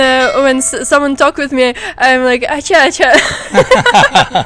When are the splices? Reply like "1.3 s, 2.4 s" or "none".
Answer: none